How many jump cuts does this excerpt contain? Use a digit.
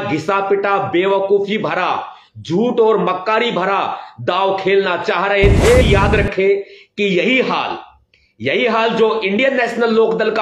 1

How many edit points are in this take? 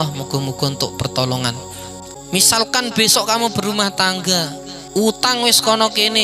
1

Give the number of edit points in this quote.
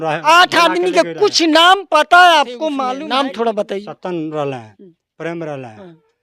1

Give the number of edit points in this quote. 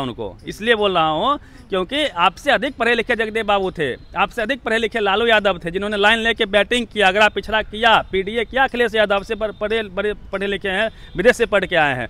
0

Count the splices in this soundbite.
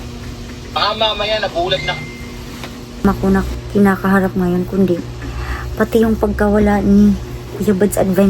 1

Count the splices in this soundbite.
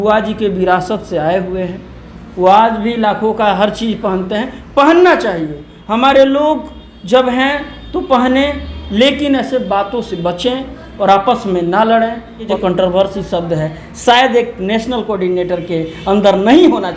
1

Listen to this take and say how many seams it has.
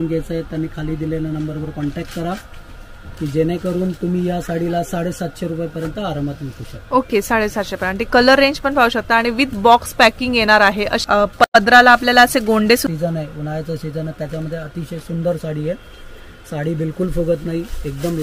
1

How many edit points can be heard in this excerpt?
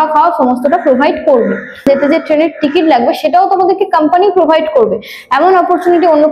1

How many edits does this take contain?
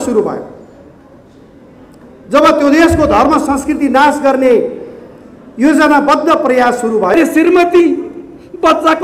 1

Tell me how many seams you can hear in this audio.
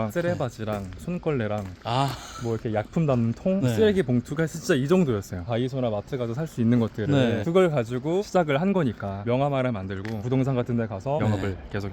3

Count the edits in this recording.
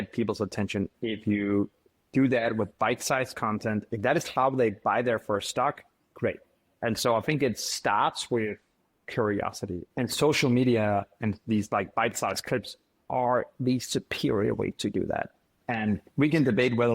4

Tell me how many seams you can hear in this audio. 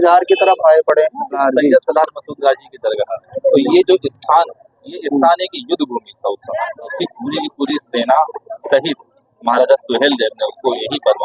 3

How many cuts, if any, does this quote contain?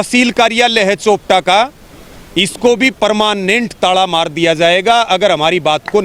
0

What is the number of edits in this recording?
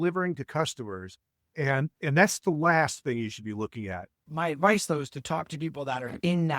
1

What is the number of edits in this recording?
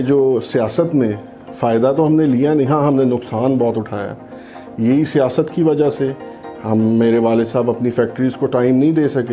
0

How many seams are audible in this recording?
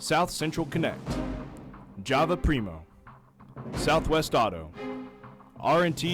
2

